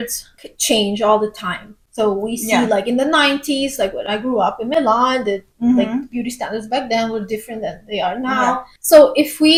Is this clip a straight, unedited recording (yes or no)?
yes